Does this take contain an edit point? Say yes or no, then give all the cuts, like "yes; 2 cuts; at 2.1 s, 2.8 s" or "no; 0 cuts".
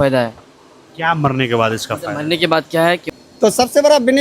yes; 1 cut; at 3.0 s